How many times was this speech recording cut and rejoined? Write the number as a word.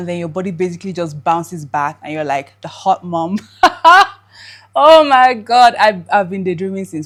zero